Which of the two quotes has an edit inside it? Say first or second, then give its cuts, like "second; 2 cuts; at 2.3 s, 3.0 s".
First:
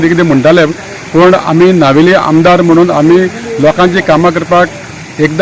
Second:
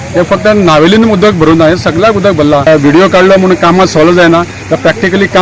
second; 1 cut; at 2.7 s